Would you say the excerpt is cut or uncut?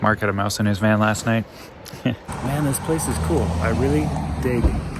cut